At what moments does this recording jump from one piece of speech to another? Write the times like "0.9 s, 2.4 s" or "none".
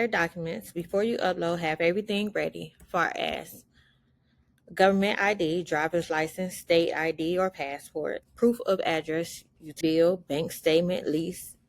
9.8 s